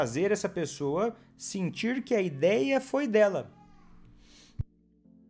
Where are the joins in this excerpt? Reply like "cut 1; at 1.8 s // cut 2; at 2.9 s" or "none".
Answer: none